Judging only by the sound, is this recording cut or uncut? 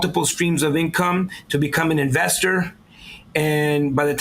uncut